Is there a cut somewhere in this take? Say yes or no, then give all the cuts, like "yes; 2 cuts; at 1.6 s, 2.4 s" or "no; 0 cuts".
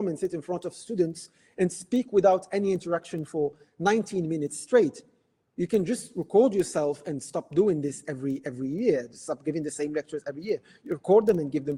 no; 0 cuts